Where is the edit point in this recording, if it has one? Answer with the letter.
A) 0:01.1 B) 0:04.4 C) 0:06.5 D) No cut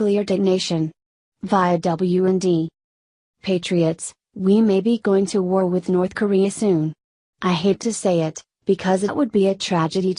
D